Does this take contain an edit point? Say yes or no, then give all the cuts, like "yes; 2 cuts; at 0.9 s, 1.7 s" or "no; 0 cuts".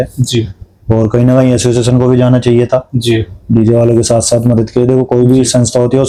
no; 0 cuts